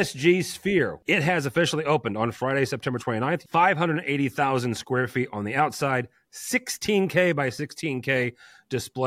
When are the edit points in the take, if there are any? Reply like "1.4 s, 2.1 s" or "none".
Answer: 1.0 s, 3.4 s